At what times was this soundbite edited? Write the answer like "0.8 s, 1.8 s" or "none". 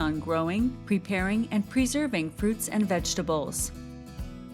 3.5 s